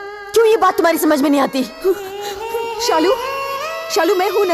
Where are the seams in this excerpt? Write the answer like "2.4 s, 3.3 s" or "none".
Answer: 1.7 s